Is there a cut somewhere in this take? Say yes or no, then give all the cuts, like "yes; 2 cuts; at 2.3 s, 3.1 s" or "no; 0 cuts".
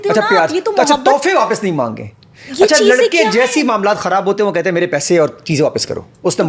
no; 0 cuts